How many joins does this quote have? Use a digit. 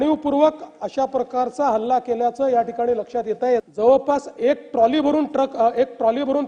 1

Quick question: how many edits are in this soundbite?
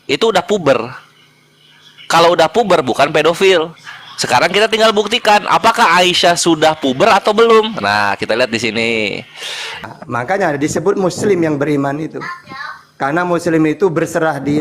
1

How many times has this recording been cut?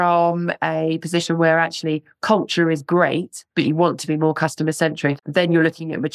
1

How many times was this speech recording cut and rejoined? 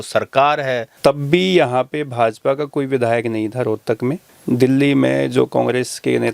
2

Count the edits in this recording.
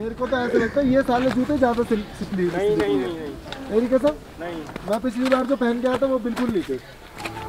0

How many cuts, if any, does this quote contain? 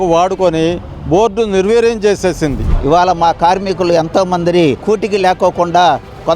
2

